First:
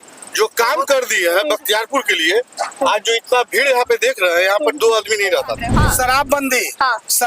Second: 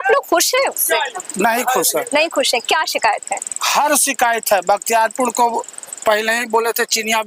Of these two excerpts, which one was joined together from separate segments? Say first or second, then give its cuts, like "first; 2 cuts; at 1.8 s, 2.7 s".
first; 1 cut; at 5.7 s